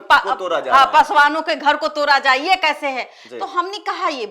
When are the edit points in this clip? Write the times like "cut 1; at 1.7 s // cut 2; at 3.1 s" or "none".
none